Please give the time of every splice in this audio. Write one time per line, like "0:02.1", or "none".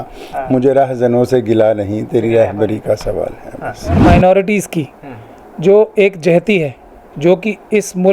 0:04.0